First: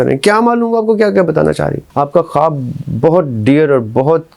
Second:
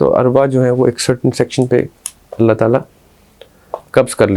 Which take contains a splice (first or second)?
first